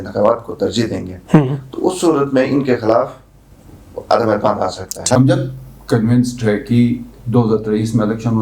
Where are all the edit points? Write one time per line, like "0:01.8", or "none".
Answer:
0:04.9